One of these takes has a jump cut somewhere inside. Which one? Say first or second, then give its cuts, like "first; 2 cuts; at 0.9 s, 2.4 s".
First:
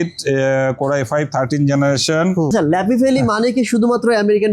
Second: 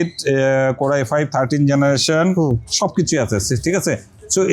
first; 1 cut; at 2.5 s